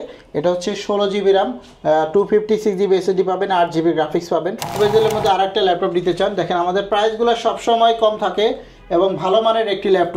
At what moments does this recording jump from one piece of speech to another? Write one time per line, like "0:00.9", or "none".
0:04.8